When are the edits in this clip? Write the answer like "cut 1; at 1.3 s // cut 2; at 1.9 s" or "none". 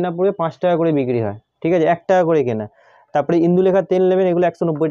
none